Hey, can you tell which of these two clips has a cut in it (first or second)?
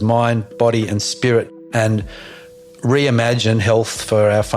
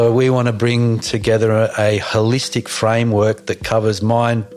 first